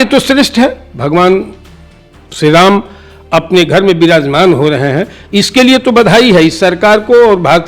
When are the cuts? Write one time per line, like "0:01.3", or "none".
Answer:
none